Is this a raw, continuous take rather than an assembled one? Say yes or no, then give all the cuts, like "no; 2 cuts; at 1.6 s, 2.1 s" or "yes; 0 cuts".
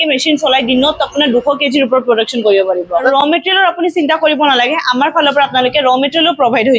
no; 1 cut; at 3.1 s